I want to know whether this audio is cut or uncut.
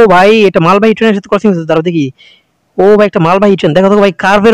uncut